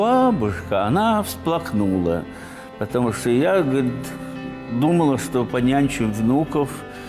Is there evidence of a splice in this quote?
no; 0 cuts

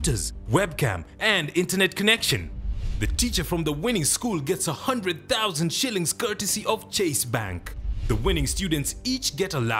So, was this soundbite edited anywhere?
no; 0 cuts

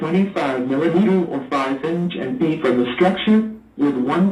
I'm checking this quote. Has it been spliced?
no; 0 cuts

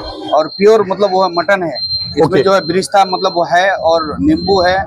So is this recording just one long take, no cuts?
yes; 0 cuts

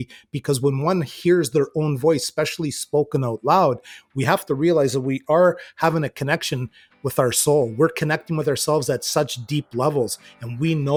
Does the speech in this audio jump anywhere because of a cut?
no; 0 cuts

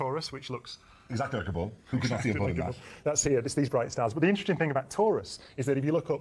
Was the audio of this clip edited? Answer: yes; 1 cut; at 4.4 s

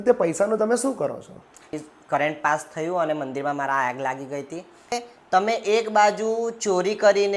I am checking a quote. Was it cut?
yes; 2 cuts; at 1.8 s, 5.0 s

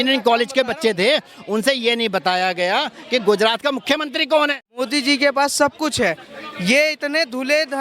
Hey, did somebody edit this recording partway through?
yes; 1 cut; at 4.6 s

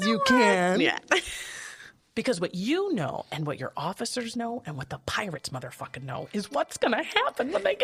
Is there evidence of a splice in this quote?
no; 0 cuts

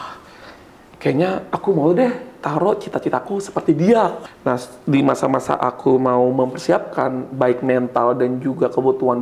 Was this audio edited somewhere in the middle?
yes; 1 cut; at 4.2 s

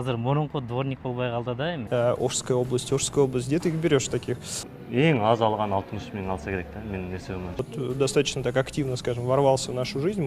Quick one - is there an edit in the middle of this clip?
yes; 3 cuts; at 1.8 s, 4.6 s, 7.6 s

